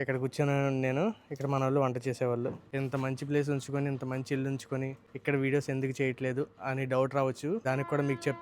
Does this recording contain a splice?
yes; 3 cuts; at 2.6 s, 5.0 s, 7.6 s

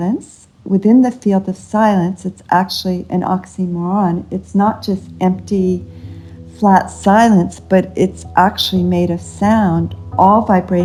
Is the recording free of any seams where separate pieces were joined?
yes; 0 cuts

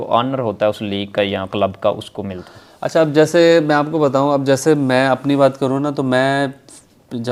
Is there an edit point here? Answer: no; 0 cuts

